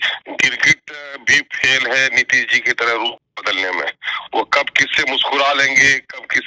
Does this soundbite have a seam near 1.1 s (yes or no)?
no